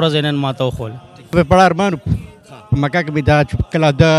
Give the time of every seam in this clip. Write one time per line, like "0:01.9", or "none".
0:01.3